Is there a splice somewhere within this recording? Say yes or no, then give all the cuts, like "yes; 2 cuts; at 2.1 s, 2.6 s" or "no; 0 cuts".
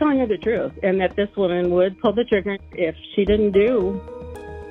yes; 1 cut; at 2.6 s